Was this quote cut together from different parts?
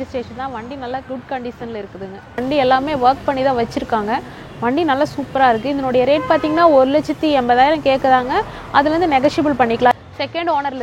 yes; 2 cuts; at 2.4 s, 9.9 s

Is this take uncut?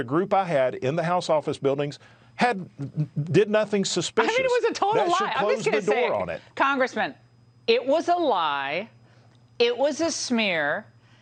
yes; 0 cuts

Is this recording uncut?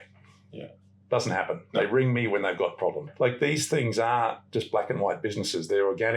no; 1 cut; at 3.1 s

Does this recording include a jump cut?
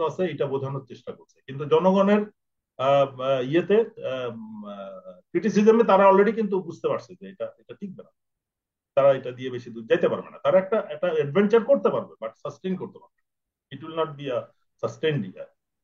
no; 0 cuts

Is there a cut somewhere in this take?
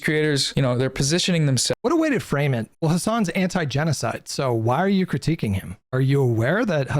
yes; 3 cuts; at 1.8 s, 2.7 s, 5.8 s

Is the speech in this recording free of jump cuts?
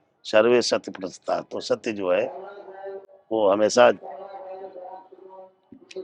yes; 0 cuts

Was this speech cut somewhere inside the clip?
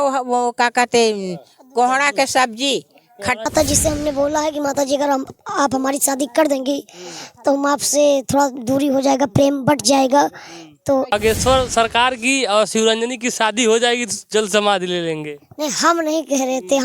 yes; 2 cuts; at 3.4 s, 11.1 s

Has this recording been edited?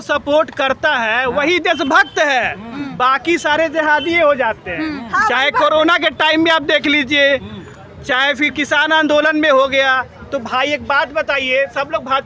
no; 0 cuts

